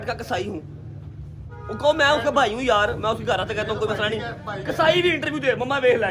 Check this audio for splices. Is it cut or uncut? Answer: uncut